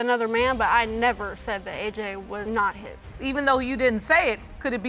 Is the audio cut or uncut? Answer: uncut